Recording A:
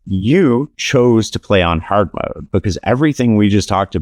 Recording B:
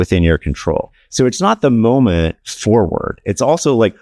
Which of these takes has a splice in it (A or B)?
B